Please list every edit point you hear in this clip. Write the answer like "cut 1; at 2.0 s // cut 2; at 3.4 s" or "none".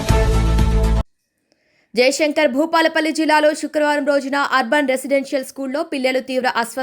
cut 1; at 1.0 s